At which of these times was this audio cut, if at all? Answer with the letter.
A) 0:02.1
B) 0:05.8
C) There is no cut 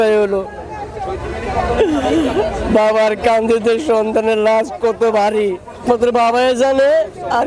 B